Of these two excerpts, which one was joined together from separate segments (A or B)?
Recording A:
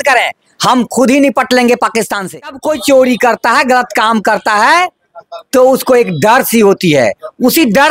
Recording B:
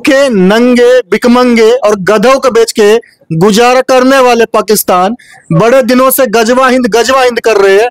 A